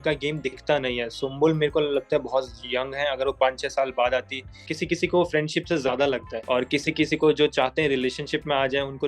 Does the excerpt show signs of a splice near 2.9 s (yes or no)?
no